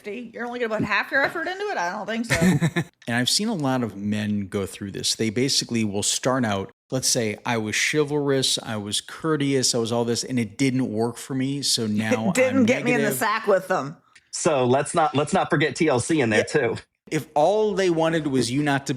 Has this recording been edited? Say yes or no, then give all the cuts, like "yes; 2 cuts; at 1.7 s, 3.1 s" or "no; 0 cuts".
yes; 4 cuts; at 2.9 s, 6.8 s, 14.0 s, 17.1 s